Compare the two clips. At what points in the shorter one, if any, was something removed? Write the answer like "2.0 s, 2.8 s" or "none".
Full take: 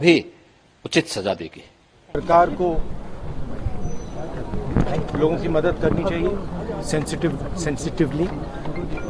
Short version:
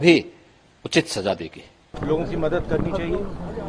2.0 s